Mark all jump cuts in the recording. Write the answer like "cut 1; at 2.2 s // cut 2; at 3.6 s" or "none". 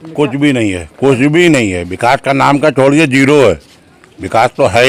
none